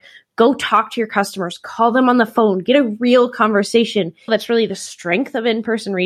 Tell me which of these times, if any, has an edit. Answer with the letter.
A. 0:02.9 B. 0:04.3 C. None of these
B